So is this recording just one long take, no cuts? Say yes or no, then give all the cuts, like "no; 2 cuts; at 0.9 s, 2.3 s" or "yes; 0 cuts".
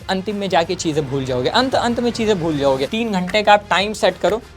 no; 1 cut; at 2.9 s